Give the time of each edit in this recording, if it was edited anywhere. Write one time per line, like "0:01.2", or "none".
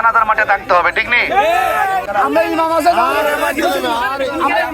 0:02.1